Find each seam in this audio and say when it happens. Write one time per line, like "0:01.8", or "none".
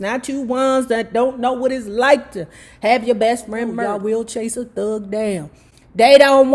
0:03.9